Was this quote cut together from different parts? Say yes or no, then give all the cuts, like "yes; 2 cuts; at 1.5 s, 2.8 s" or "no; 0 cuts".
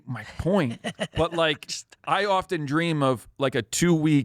yes; 1 cut; at 1.1 s